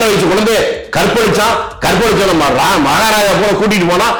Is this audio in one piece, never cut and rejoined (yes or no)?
yes